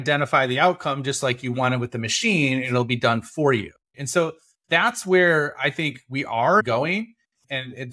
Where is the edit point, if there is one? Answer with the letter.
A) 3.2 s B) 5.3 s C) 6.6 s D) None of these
C